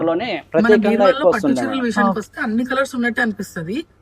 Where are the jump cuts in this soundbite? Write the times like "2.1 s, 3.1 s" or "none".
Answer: 1.7 s